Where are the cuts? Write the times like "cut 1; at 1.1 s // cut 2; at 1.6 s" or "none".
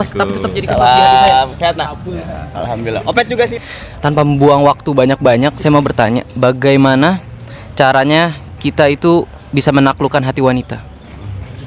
cut 1; at 3.5 s